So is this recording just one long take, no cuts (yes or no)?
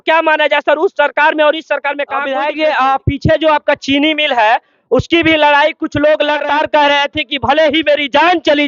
no